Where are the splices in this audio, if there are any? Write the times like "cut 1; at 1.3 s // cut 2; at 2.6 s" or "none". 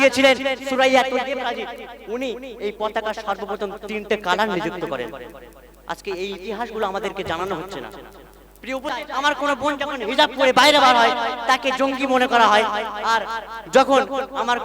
cut 1; at 8.9 s